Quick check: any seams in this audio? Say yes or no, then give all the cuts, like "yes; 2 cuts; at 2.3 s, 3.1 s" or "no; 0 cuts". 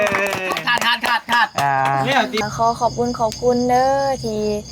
yes; 1 cut; at 2.4 s